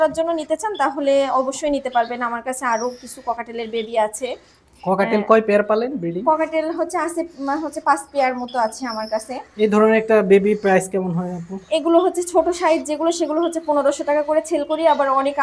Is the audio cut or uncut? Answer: uncut